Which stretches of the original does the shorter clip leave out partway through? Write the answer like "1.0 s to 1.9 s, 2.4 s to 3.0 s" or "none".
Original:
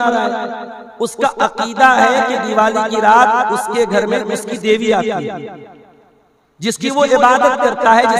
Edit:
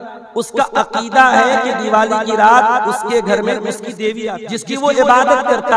5.0 s to 6.5 s